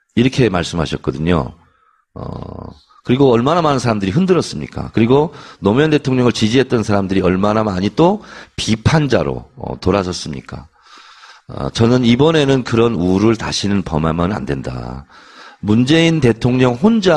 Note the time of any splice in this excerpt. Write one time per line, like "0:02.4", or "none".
none